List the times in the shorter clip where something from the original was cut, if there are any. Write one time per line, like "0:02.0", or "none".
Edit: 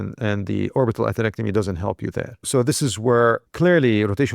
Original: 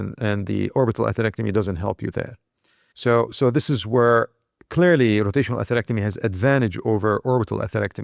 0:02.4
0:03.5